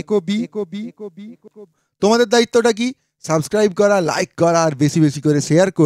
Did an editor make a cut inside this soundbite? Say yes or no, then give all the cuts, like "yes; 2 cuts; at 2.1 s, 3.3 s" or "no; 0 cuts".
yes; 1 cut; at 1.8 s